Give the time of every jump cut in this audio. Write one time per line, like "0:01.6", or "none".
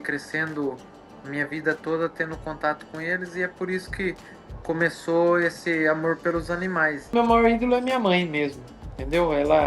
0:07.1